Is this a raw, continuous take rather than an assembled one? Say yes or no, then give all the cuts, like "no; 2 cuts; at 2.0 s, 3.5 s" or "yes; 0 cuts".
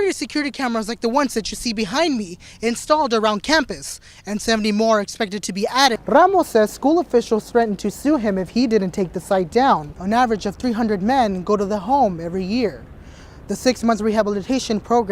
no; 2 cuts; at 6.0 s, 9.9 s